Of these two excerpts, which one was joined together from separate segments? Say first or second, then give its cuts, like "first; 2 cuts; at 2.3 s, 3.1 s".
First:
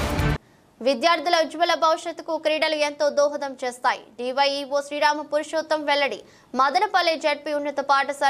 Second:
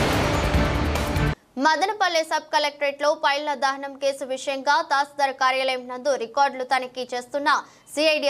second; 1 cut; at 1.2 s